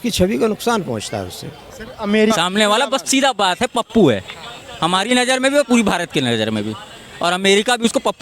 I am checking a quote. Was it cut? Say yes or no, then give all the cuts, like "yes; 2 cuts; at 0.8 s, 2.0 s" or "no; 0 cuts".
yes; 1 cut; at 2.3 s